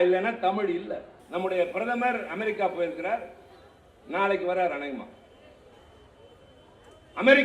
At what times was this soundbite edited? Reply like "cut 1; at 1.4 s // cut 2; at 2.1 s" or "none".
cut 1; at 1.1 s